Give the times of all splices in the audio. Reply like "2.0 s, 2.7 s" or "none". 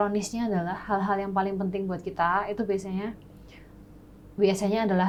none